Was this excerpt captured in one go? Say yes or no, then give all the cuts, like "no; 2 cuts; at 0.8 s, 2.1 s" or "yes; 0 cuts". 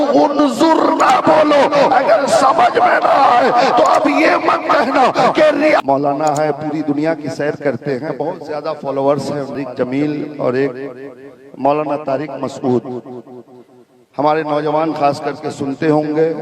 no; 2 cuts; at 5.8 s, 9.6 s